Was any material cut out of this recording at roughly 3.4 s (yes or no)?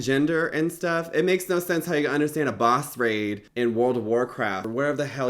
yes